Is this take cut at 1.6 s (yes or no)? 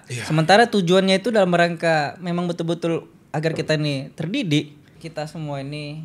no